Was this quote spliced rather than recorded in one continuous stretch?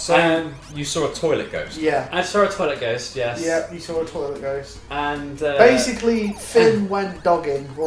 no; 0 cuts

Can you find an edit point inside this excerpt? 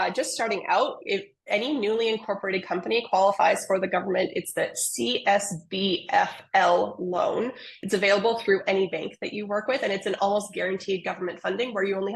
no; 0 cuts

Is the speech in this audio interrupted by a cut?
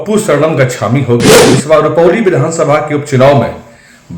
yes; 1 cut; at 1.4 s

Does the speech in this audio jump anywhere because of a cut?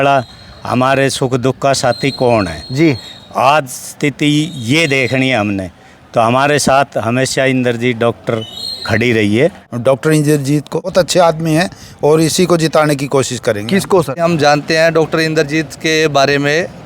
yes; 3 cuts; at 9.7 s, 10.8 s, 14.1 s

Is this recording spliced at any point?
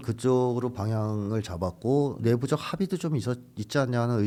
no; 0 cuts

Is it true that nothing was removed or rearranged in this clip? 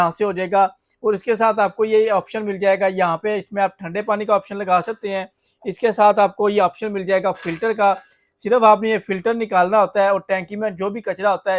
yes; 0 cuts

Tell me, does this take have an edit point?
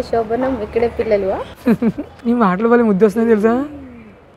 no; 0 cuts

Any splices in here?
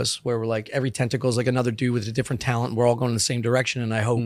no; 0 cuts

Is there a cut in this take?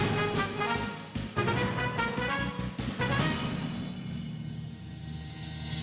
no; 0 cuts

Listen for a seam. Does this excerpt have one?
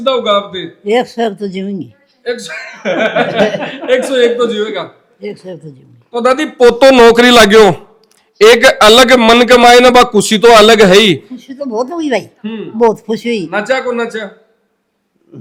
no; 0 cuts

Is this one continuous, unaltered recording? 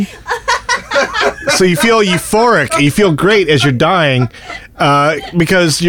yes; 0 cuts

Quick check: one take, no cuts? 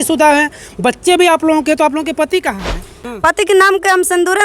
no; 1 cut; at 2.9 s

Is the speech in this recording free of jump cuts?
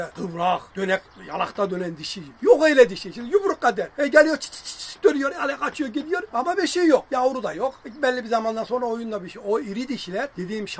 yes; 0 cuts

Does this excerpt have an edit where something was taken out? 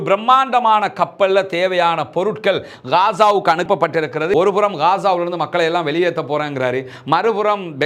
yes; 1 cut; at 4.3 s

